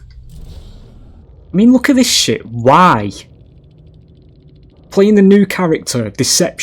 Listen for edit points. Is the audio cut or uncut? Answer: cut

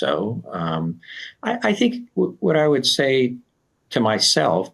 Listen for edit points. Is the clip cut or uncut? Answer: uncut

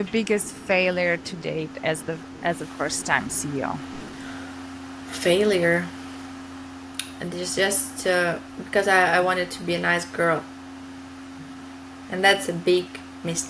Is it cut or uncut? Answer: uncut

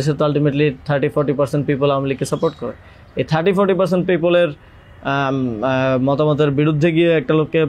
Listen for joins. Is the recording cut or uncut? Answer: uncut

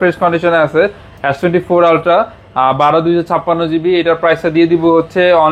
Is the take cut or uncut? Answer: uncut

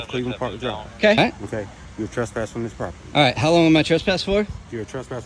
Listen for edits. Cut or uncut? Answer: cut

